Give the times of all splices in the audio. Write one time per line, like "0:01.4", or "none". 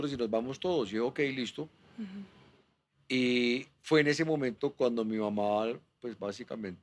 none